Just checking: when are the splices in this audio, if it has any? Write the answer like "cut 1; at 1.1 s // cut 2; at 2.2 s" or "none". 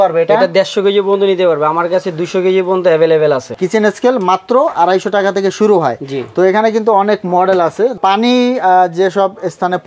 cut 1; at 3.5 s // cut 2; at 8.0 s